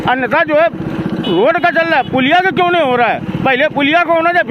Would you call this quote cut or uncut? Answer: uncut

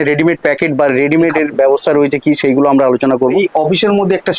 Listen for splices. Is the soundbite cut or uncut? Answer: cut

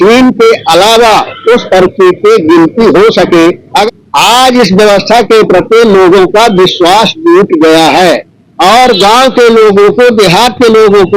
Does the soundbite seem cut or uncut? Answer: cut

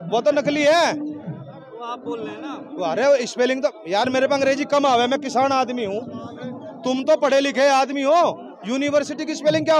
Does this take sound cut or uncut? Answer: uncut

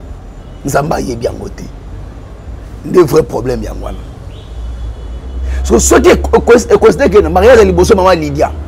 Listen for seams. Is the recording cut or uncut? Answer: uncut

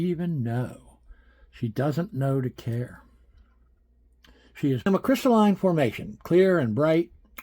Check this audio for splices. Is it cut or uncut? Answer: cut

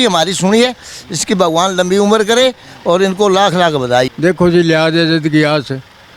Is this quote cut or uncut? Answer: cut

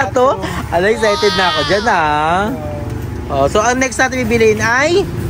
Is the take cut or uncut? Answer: uncut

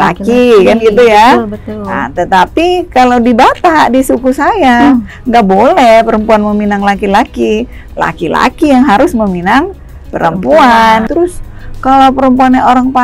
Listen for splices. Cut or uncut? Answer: cut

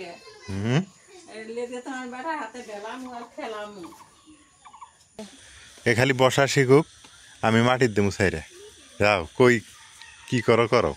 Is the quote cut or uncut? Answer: cut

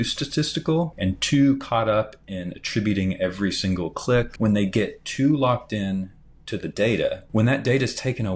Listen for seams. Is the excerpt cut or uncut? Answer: cut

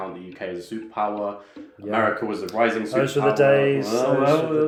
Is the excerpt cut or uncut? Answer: uncut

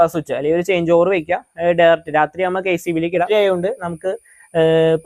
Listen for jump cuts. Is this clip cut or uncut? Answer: cut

